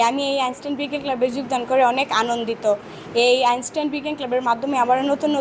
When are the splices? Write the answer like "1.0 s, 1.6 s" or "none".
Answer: none

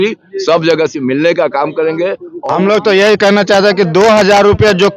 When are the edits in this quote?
2.3 s

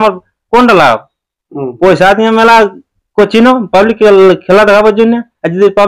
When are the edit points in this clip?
none

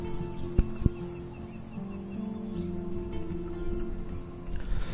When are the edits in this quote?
1.7 s

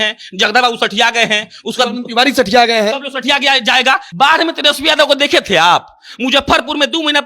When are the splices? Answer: 4.1 s

